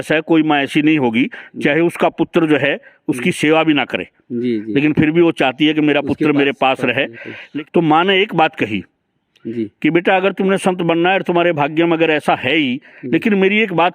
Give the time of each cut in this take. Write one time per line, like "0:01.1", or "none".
0:07.5